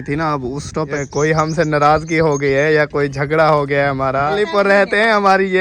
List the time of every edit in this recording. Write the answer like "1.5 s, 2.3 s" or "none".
1.0 s, 4.4 s